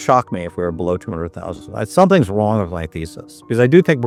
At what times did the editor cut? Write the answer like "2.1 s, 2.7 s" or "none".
none

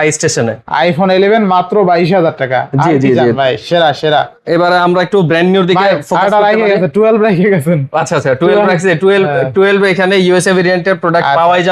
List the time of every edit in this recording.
none

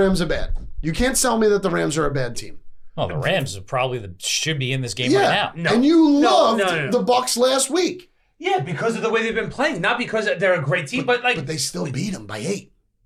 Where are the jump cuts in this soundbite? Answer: none

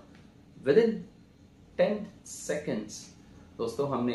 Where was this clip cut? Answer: none

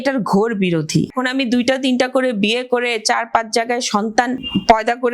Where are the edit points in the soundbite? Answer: 1.1 s, 4.4 s

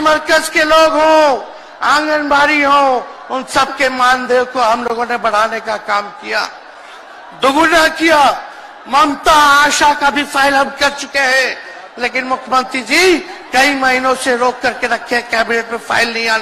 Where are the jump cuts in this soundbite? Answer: none

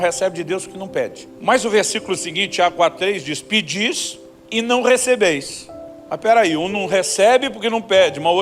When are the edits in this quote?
1.2 s

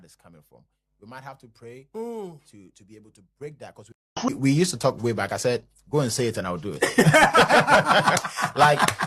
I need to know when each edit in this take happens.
4.3 s

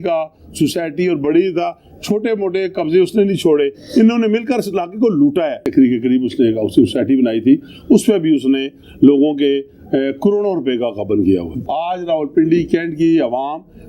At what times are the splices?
5.6 s, 11.6 s

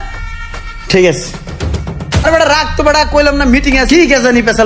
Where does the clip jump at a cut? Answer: 2.2 s

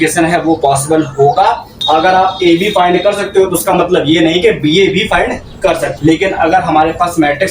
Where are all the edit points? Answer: 1.7 s, 5.9 s

